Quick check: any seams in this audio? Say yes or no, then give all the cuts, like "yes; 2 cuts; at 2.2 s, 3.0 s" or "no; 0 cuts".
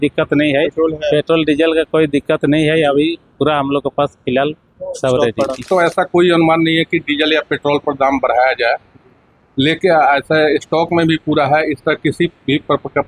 yes; 1 cut; at 5.7 s